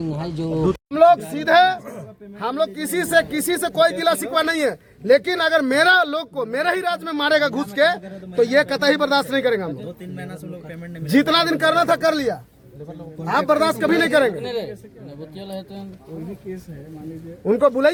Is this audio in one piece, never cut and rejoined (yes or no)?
yes